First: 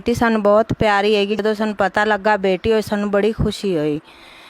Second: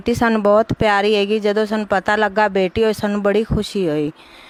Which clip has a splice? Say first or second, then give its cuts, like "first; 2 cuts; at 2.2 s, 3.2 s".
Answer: first; 1 cut; at 1.4 s